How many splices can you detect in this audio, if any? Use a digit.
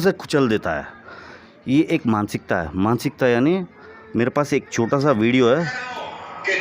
1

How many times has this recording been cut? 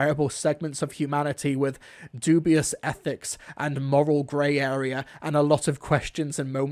0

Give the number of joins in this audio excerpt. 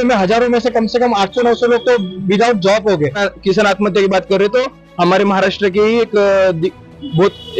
1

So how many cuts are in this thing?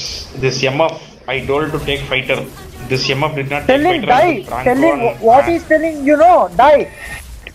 0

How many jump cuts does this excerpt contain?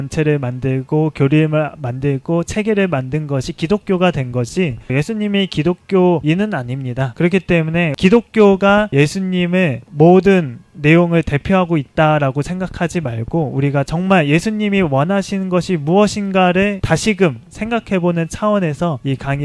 1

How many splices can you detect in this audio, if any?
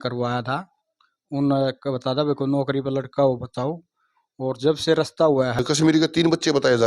1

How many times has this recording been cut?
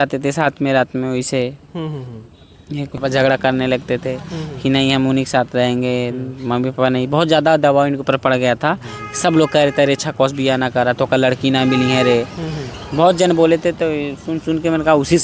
1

